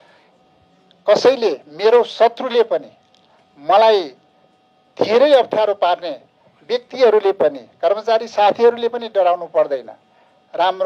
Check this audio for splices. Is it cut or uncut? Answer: uncut